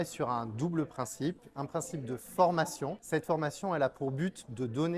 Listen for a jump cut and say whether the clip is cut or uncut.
cut